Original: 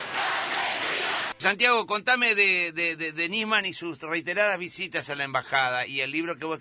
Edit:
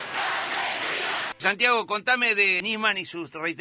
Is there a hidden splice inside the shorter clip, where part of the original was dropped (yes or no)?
yes